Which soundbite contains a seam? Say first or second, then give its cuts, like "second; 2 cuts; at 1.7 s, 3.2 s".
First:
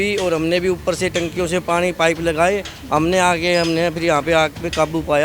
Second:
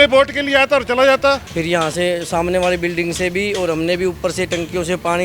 second; 1 cut; at 1.5 s